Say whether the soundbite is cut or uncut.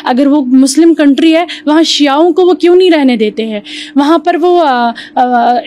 uncut